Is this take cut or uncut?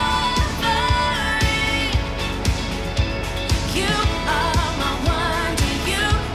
uncut